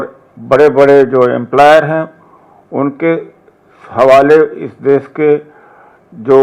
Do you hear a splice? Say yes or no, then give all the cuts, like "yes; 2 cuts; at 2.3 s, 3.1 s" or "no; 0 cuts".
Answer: no; 0 cuts